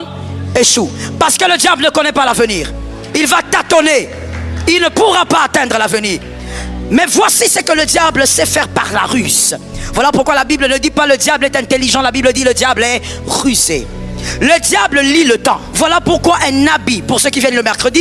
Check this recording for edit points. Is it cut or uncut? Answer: cut